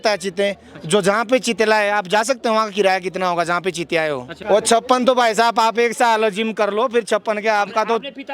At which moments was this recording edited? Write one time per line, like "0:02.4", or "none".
0:04.3